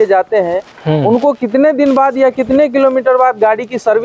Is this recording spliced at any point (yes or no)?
no